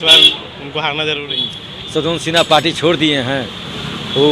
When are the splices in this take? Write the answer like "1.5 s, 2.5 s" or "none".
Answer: 1.3 s